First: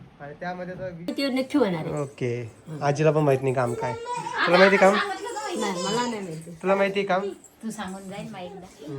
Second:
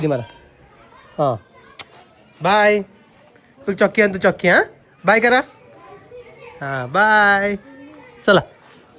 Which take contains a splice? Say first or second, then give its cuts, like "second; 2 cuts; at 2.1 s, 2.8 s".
first; 1 cut; at 1.1 s